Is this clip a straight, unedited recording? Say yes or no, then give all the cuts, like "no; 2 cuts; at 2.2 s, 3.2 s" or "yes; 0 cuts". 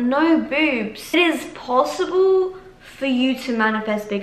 no; 1 cut; at 1.1 s